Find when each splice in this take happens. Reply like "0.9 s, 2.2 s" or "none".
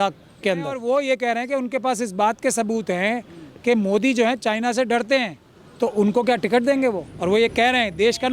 0.8 s, 7.1 s